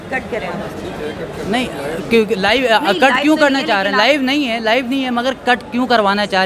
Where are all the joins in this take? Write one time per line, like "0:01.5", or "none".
none

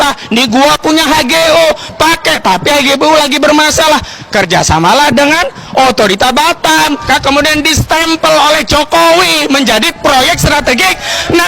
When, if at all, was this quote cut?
0:07.0

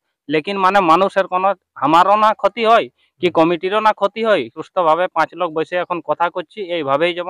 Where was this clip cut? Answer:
0:04.6

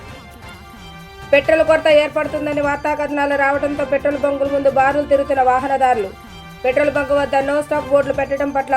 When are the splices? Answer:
0:01.2

